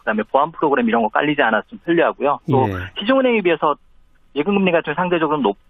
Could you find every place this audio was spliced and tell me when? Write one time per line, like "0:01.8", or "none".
0:01.2